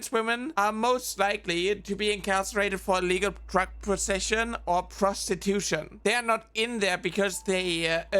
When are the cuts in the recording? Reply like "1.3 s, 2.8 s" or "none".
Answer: 5.9 s